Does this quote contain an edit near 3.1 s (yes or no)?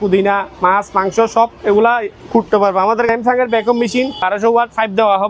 yes